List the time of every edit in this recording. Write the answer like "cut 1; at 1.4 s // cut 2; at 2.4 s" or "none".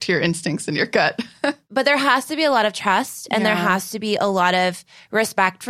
cut 1; at 1.6 s